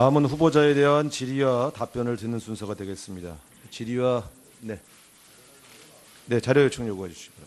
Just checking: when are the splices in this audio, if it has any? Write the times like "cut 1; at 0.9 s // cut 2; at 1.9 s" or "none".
none